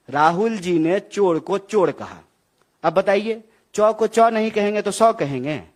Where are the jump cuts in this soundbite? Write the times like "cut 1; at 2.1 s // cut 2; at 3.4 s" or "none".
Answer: none